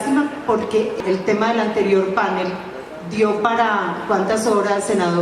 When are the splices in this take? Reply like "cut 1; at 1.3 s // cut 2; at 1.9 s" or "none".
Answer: cut 1; at 0.9 s

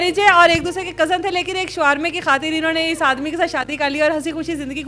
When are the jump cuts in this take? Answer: none

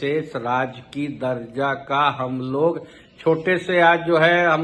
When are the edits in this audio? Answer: none

